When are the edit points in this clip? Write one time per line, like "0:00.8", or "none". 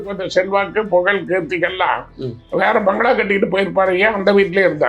none